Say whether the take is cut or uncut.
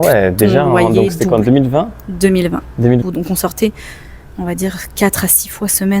cut